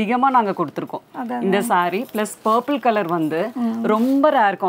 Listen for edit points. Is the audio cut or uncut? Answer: uncut